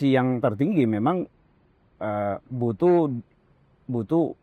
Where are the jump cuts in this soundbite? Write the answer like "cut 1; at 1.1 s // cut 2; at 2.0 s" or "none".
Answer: none